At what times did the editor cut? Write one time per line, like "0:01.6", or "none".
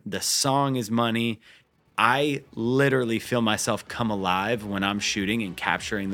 none

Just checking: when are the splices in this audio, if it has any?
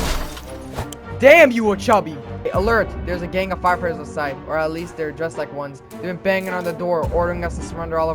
0:02.3

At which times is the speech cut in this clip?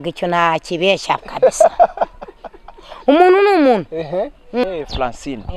0:04.6

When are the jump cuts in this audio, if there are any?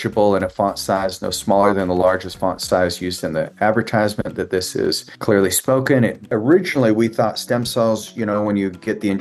0:05.1
0:06.2

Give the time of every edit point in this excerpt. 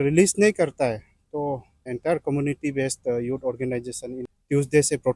0:01.9
0:04.2

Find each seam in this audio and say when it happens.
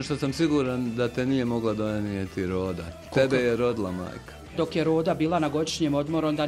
0:04.6

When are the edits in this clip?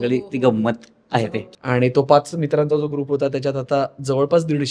0:01.4

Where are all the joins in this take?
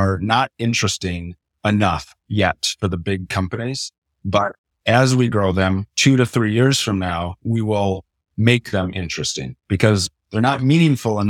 none

